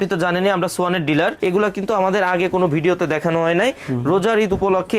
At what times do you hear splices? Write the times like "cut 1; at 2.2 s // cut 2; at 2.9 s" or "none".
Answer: cut 1; at 1.4 s